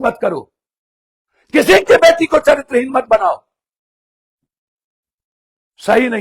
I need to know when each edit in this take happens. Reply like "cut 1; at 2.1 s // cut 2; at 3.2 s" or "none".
none